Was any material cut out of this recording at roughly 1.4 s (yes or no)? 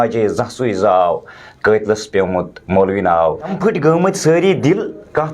no